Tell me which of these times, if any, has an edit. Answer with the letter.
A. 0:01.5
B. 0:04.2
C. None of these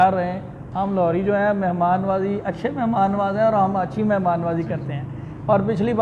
C